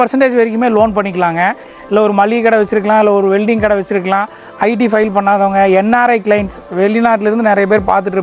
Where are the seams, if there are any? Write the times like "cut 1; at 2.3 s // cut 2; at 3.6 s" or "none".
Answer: cut 1; at 1.7 s